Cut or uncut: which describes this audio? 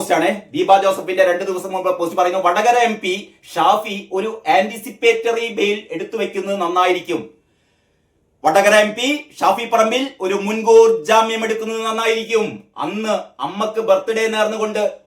uncut